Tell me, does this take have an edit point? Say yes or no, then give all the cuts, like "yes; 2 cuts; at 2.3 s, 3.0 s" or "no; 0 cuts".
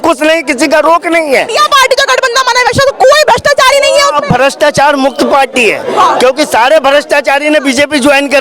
yes; 1 cut; at 1.5 s